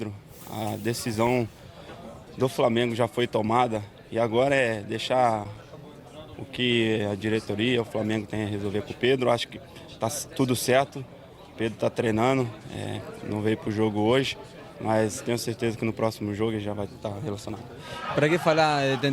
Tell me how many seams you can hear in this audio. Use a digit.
1